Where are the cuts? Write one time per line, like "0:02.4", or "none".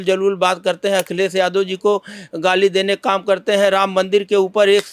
none